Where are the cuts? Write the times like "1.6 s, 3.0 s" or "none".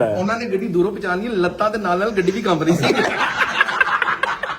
3.2 s

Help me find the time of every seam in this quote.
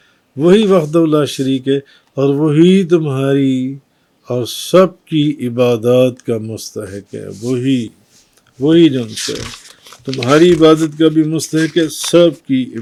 none

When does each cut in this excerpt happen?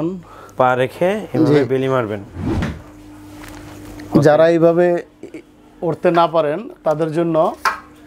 none

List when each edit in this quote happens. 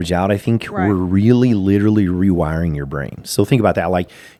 none

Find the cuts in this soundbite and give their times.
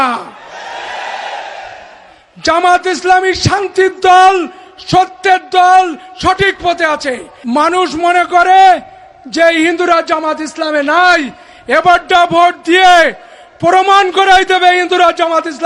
7.3 s

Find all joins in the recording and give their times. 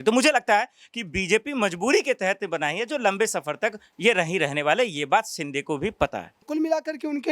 6.4 s

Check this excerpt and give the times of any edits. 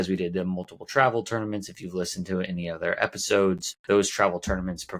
3.7 s

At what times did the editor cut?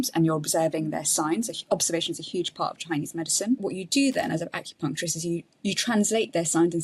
3.7 s

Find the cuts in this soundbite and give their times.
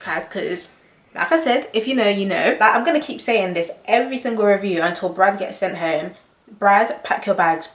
2.6 s

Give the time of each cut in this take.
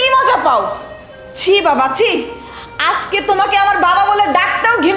none

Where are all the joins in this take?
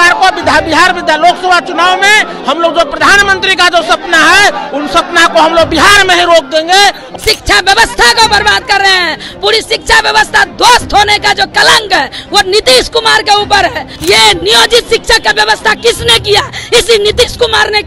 7.0 s, 13.9 s

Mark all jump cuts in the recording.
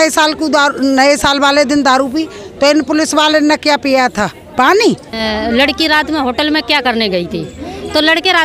5.2 s

